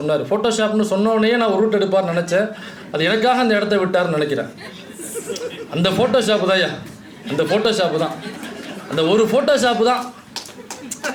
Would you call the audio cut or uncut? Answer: uncut